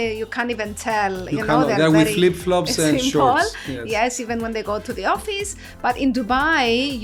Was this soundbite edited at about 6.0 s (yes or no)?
no